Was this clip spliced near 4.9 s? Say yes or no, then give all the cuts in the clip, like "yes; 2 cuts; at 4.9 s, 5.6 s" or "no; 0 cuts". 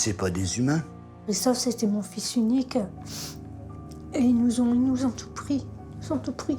no; 1 cut; at 1.2 s